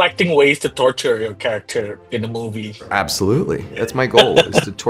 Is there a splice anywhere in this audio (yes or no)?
yes